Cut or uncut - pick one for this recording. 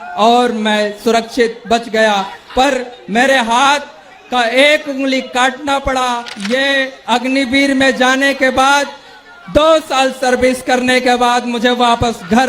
cut